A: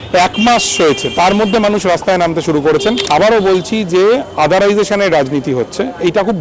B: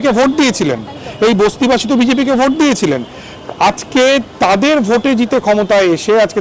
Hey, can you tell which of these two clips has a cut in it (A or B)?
A